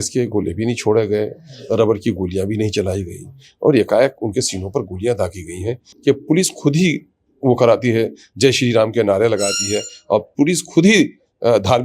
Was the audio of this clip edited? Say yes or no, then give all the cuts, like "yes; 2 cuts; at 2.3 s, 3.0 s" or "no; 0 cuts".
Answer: yes; 1 cut; at 5.9 s